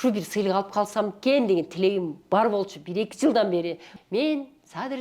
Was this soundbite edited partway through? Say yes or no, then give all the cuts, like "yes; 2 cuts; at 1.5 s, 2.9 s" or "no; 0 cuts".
yes; 1 cut; at 3.9 s